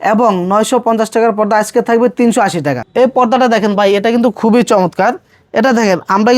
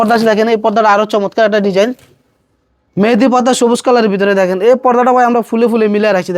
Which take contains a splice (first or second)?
first